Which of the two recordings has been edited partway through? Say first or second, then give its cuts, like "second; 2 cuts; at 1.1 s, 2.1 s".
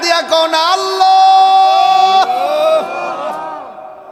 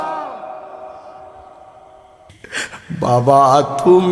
second; 1 cut; at 2.3 s